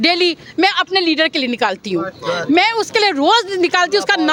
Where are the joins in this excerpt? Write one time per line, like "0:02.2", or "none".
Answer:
none